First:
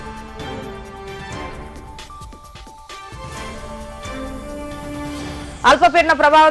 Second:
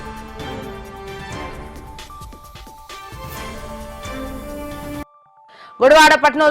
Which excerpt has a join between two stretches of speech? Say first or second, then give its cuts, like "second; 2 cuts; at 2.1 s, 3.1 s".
second; 1 cut; at 5.0 s